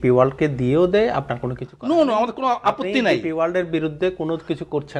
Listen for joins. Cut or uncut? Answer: uncut